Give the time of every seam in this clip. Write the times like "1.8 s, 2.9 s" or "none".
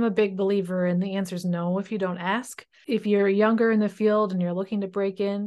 2.7 s